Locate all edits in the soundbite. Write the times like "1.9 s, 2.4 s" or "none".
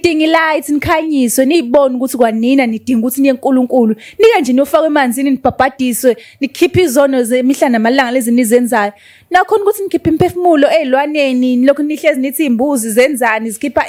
none